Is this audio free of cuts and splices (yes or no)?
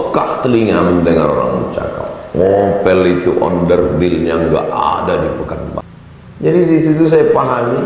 no